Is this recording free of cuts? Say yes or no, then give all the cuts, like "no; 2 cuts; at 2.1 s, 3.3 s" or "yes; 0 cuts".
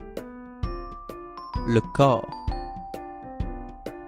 no; 1 cut; at 1.0 s